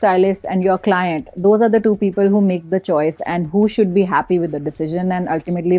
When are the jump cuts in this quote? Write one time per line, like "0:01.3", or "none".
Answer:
none

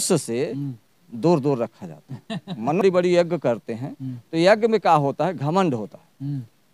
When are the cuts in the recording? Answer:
0:02.8

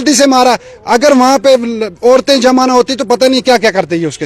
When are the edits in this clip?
none

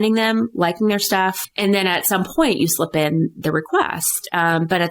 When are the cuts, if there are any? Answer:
0:01.5

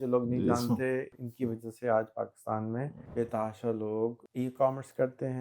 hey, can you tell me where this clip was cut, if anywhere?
0:01.1
0:03.0
0:04.2

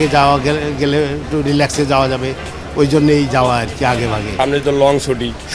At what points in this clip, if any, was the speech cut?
0:04.2

